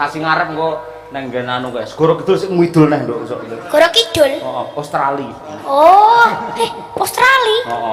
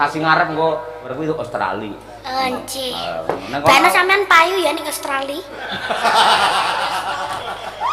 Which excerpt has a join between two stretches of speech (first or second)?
second